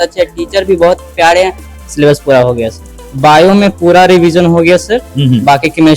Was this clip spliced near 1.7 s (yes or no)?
yes